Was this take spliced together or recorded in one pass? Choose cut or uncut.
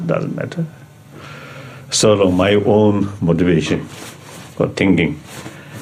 uncut